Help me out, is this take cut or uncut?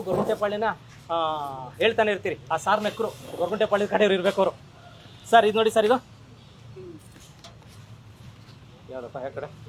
uncut